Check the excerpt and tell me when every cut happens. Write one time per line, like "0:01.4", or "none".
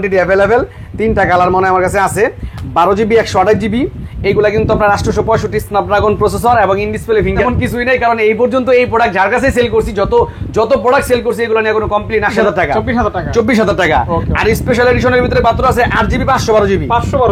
0:07.4
0:12.3